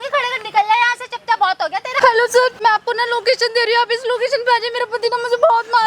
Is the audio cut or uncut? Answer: cut